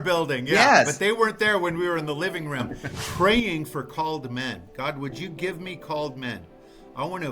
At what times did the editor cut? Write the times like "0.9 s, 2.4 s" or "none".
2.8 s